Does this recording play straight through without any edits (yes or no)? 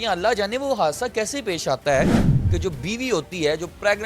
no